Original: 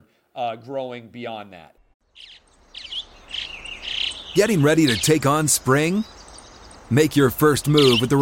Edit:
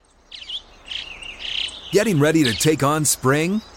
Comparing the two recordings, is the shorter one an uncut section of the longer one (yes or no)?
yes